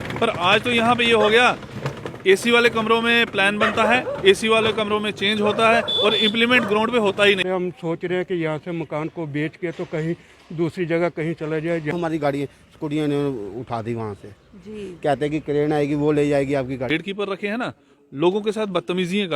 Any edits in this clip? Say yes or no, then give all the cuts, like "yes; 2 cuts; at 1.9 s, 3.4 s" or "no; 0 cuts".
yes; 3 cuts; at 7.4 s, 11.9 s, 16.9 s